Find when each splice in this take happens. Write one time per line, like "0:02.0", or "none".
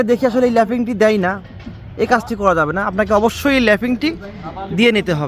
none